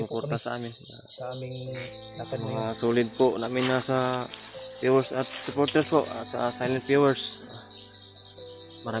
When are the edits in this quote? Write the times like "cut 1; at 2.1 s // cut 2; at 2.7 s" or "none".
none